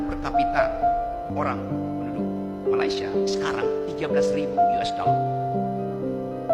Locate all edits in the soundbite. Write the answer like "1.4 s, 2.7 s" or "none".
1.3 s